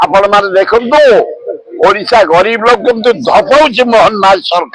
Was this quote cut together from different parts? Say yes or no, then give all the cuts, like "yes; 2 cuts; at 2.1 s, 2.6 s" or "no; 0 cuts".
no; 0 cuts